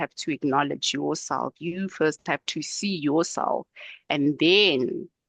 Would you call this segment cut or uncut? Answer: uncut